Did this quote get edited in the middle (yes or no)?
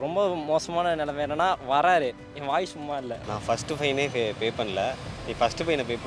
yes